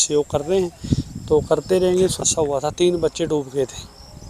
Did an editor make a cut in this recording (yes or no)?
yes